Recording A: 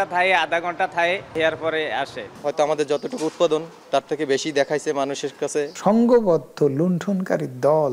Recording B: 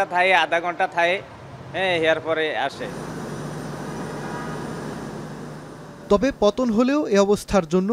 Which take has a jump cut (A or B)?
A